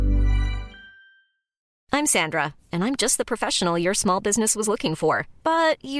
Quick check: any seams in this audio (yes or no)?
yes